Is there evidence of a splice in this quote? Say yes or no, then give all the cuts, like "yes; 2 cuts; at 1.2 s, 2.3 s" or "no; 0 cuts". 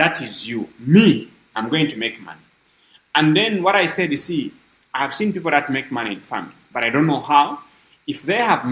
no; 0 cuts